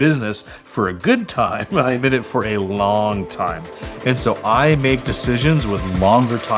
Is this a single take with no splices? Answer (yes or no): yes